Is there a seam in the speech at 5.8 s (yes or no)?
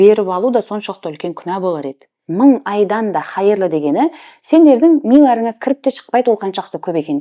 no